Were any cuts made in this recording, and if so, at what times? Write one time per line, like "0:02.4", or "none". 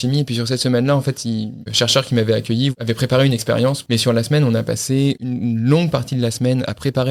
0:01.7
0:02.7
0:03.8
0:05.2